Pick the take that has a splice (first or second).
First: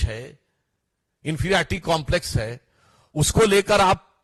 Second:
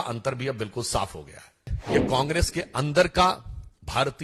second